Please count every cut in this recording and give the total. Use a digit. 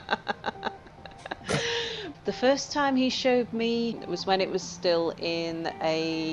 2